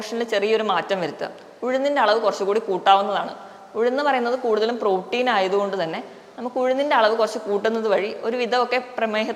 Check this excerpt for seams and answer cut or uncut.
uncut